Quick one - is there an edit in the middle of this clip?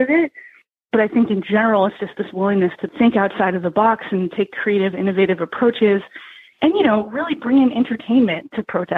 yes; 1 cut; at 2.8 s

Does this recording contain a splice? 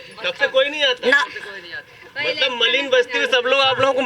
no; 0 cuts

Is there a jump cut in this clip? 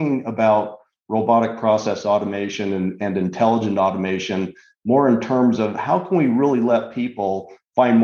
no; 0 cuts

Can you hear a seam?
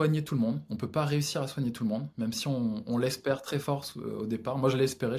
no; 0 cuts

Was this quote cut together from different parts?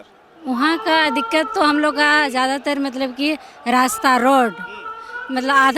no; 0 cuts

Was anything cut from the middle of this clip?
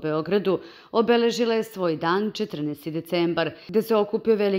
yes; 1 cut; at 3.6 s

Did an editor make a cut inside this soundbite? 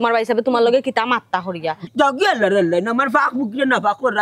yes; 1 cut; at 1.8 s

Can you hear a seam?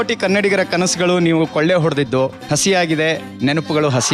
no; 0 cuts

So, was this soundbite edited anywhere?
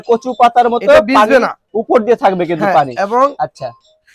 no; 0 cuts

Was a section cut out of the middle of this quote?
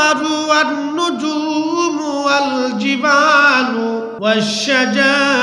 yes; 1 cut; at 4.1 s

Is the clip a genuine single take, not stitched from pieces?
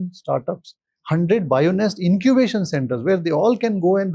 yes; 0 cuts

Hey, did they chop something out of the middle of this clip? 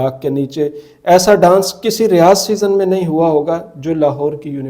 no; 0 cuts

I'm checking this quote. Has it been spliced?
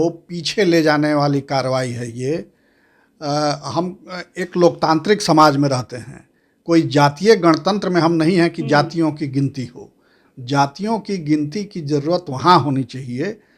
no; 0 cuts

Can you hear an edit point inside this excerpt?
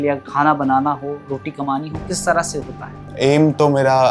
yes; 1 cut; at 3.1 s

